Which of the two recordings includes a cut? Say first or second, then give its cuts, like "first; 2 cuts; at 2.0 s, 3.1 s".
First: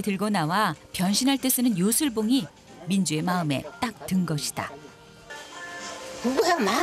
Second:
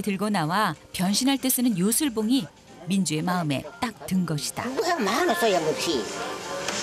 second; 1 cut; at 4.7 s